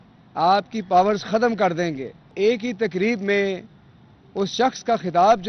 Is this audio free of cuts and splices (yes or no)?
no